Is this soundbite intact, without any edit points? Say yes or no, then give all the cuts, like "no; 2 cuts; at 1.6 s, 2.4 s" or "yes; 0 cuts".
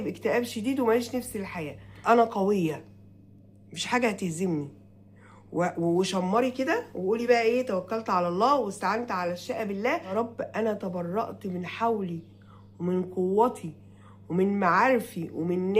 no; 2 cuts; at 2.0 s, 10.1 s